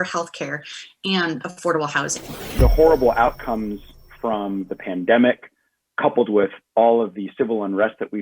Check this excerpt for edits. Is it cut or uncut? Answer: cut